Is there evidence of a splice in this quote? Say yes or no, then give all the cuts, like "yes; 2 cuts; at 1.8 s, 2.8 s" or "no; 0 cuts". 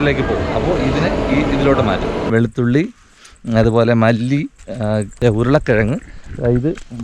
yes; 2 cuts; at 2.2 s, 5.1 s